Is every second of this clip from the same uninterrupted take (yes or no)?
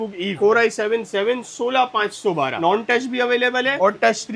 no